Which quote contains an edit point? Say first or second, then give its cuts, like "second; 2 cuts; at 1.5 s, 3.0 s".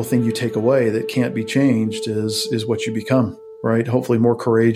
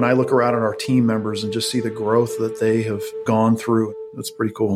second; 2 cuts; at 3.1 s, 3.9 s